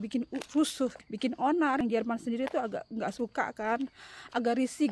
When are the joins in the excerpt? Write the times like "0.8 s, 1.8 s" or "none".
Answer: 1.0 s, 1.8 s